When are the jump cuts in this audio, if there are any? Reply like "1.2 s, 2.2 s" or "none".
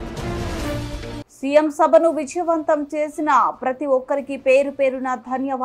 1.2 s

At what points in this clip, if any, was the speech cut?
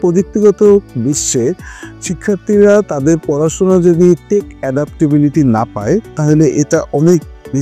none

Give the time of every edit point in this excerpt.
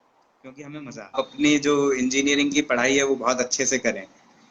1.1 s

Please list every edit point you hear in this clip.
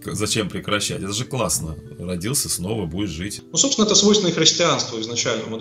3.4 s

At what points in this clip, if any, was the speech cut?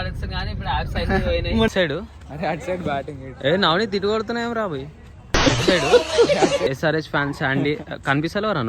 1.7 s, 6.7 s

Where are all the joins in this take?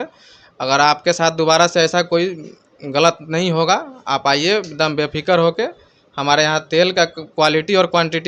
none

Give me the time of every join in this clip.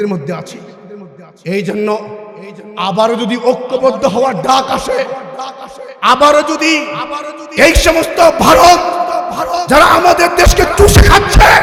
none

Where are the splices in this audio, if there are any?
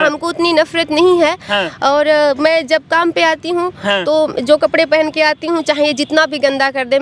none

